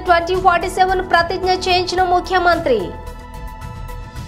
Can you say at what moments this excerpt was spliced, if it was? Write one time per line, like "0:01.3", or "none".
0:02.9